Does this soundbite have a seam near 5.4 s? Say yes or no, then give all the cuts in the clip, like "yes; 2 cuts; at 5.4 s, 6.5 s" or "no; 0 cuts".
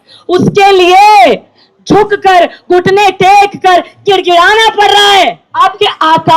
yes; 1 cut; at 5.4 s